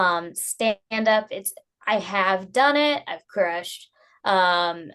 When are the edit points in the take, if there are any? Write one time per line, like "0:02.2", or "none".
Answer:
none